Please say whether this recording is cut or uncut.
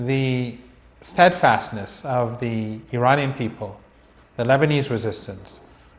uncut